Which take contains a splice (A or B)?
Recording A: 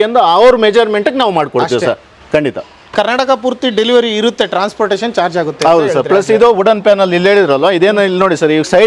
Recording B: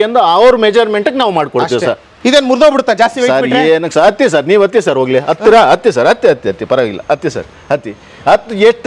B